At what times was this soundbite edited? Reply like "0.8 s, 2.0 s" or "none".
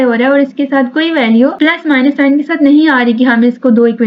1.5 s

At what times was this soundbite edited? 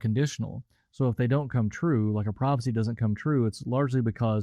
none

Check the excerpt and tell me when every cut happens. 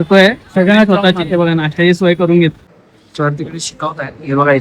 2.6 s

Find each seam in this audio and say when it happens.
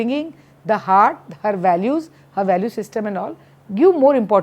none

